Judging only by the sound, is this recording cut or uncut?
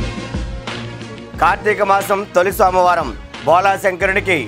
cut